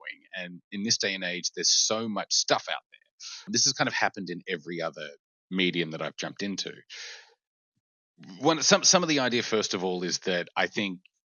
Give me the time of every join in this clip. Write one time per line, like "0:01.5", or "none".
0:03.4